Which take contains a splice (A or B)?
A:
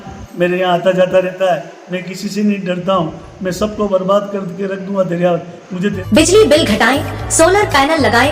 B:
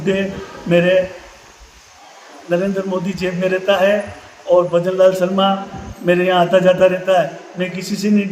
A